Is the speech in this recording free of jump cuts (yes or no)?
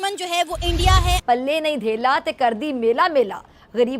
no